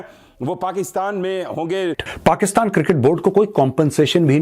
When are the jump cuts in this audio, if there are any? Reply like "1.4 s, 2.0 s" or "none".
2.1 s